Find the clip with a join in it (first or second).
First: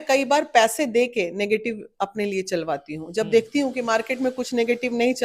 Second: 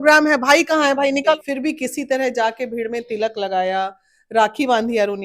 second